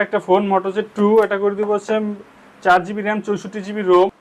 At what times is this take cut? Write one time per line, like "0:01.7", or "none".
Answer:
none